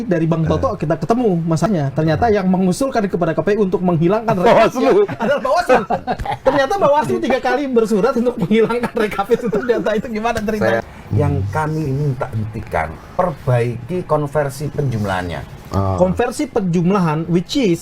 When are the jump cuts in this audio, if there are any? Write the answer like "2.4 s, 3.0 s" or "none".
1.7 s, 6.3 s, 10.8 s